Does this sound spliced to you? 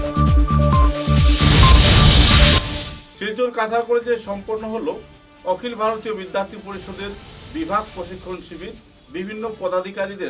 no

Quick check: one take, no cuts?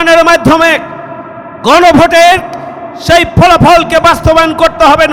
yes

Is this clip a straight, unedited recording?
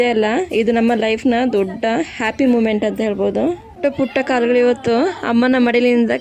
no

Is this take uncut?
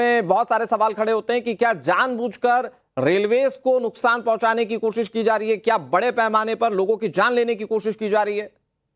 no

